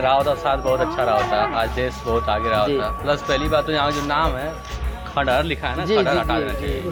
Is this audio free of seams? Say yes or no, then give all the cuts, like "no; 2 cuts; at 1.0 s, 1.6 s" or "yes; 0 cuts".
yes; 0 cuts